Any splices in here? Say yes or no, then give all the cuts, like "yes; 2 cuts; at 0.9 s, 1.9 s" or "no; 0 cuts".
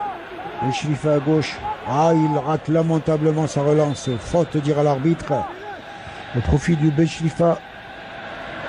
no; 0 cuts